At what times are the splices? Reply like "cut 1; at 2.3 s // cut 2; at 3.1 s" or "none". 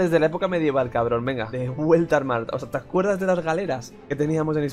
none